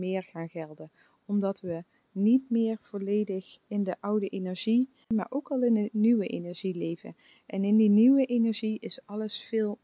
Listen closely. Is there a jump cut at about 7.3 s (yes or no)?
no